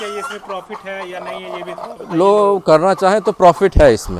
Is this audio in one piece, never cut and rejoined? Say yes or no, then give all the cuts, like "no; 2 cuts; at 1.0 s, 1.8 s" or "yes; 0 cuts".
yes; 0 cuts